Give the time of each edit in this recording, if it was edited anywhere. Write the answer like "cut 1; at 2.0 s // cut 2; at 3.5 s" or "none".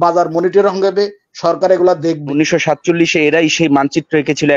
cut 1; at 2.3 s

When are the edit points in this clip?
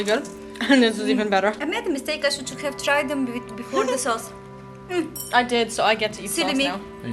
cut 1; at 1.6 s

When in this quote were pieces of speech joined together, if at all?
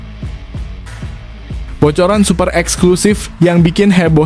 cut 1; at 0.8 s // cut 2; at 1.7 s

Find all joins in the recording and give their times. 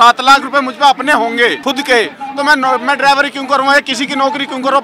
cut 1; at 1.6 s

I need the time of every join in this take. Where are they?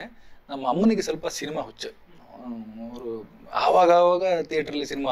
none

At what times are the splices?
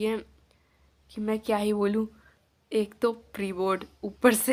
none

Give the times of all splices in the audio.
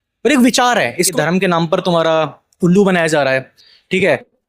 cut 1; at 1.1 s

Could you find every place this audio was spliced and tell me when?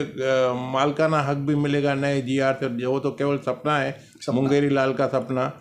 none

